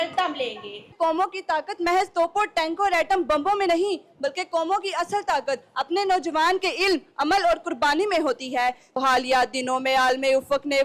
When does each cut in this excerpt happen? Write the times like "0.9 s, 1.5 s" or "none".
0.9 s, 9.0 s